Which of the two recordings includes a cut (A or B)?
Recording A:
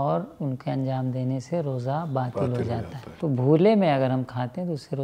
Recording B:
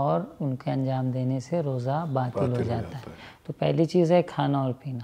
A